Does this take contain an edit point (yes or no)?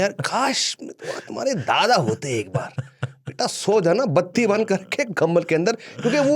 no